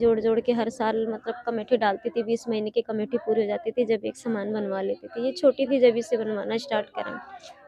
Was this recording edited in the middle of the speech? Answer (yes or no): no